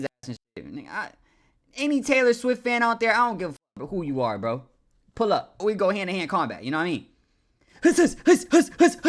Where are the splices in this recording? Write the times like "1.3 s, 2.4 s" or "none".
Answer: none

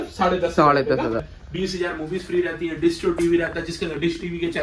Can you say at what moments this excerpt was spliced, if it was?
1.3 s

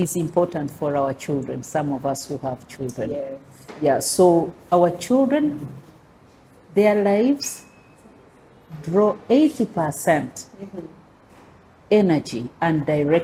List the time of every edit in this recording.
none

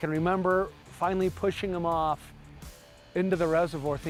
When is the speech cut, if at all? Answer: none

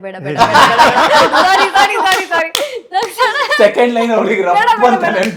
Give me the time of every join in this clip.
none

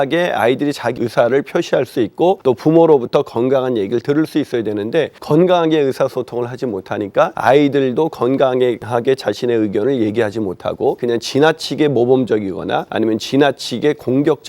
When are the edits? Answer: 0.9 s, 2.4 s, 5.2 s, 7.4 s, 8.8 s, 11.0 s, 12.9 s

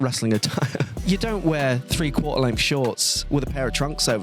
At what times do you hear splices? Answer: 0.9 s

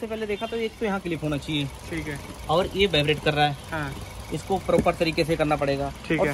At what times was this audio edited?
none

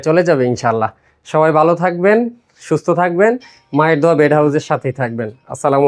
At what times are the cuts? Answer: none

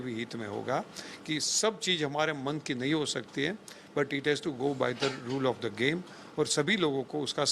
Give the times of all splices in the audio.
none

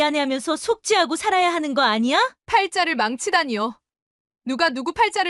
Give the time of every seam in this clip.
2.4 s

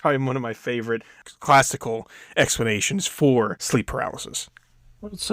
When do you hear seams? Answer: 1.2 s, 3.6 s

